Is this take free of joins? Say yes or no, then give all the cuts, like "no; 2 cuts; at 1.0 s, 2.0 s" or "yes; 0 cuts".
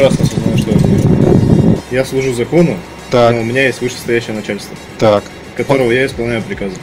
no; 1 cut; at 1.8 s